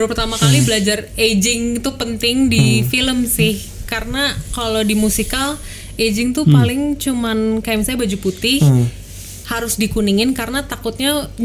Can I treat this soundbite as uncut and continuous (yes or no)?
yes